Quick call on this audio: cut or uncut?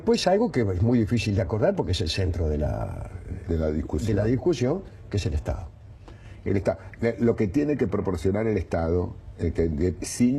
uncut